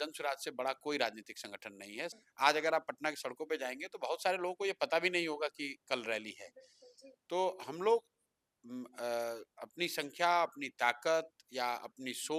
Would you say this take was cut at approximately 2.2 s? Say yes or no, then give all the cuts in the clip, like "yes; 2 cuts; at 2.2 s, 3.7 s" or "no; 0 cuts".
yes; 1 cut; at 2.2 s